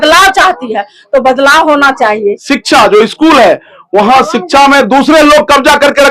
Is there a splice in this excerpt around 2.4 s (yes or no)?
yes